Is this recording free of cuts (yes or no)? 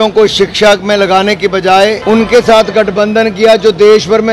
no